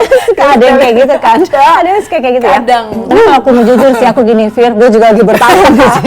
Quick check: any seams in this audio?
yes; 1 cut; at 3.1 s

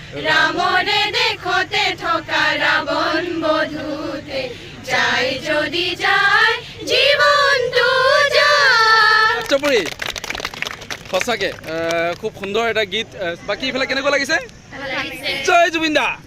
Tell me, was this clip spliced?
yes; 2 cuts; at 9.5 s, 13.4 s

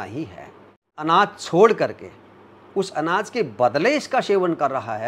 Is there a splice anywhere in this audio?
yes; 1 cut; at 0.9 s

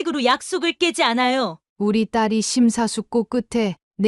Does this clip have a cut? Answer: yes; 1 cut; at 1.6 s

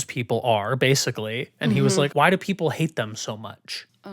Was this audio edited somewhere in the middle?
yes; 1 cut; at 2.1 s

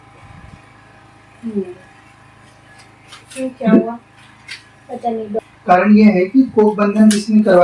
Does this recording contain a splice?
yes; 1 cut; at 5.4 s

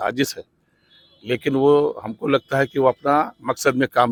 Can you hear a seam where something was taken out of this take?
no; 0 cuts

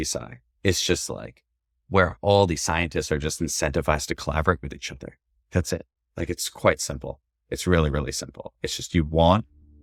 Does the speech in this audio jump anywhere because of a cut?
no; 0 cuts

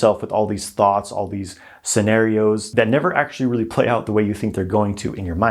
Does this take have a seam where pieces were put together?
no; 0 cuts

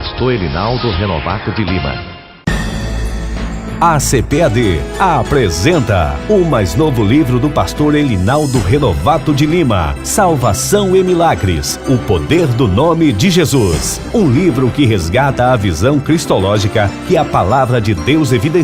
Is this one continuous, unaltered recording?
no; 1 cut; at 2.3 s

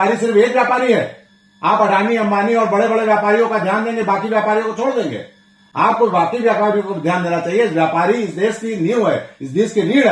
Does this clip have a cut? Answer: no; 0 cuts

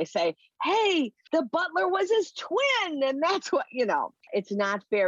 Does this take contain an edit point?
yes; 1 cut; at 1.2 s

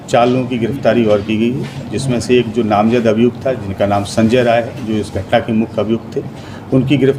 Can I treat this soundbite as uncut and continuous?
yes; 0 cuts

